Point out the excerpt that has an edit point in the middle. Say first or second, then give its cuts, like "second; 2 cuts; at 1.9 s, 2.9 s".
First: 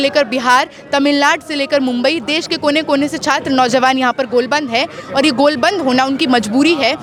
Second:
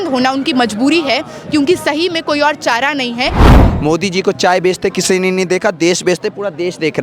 second; 1 cut; at 3.5 s